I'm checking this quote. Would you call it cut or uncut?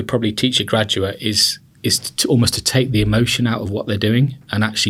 uncut